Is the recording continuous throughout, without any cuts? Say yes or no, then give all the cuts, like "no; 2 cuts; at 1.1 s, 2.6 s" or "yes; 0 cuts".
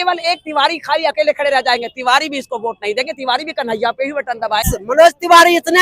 no; 1 cut; at 4.7 s